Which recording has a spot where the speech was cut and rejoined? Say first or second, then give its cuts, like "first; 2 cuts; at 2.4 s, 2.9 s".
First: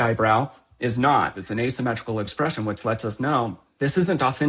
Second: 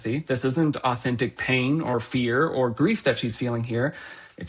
first; 2 cuts; at 1.4 s, 3.7 s